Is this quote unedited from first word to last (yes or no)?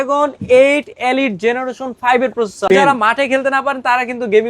no